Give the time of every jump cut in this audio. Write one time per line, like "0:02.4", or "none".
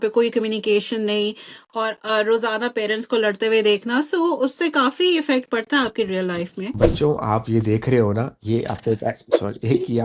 0:06.7